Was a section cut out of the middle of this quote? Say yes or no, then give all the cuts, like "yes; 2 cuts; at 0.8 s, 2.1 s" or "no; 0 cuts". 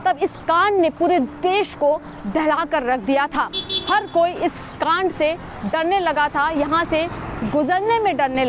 no; 0 cuts